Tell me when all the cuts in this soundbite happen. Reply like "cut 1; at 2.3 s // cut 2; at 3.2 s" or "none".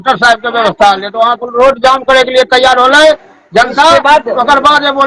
none